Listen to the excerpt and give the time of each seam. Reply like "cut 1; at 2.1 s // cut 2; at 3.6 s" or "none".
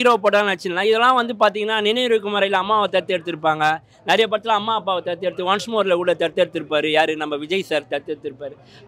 none